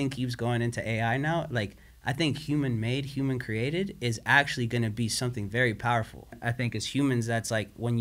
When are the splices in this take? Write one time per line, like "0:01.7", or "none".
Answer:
0:06.4